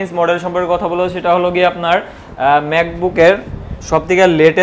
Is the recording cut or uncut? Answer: uncut